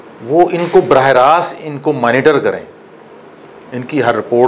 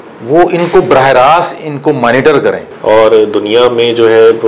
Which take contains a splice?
second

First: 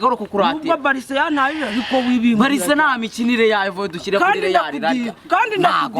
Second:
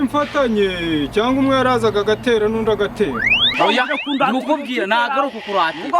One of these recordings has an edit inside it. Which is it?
second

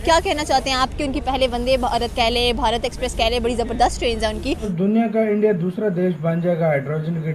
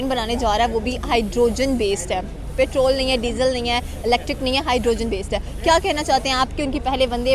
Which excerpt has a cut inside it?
first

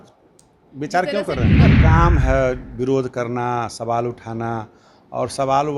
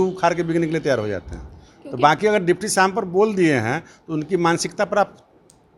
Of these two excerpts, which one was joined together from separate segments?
first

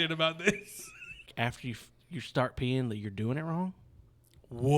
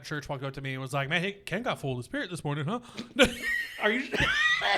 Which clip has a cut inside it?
first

